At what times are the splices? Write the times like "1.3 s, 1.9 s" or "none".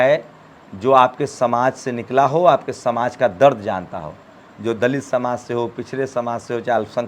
none